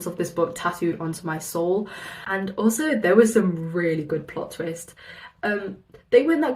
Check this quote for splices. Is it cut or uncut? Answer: cut